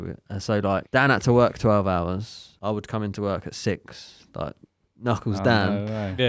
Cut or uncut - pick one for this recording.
cut